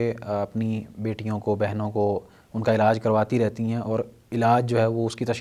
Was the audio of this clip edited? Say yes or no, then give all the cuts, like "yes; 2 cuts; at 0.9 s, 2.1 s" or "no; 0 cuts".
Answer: no; 0 cuts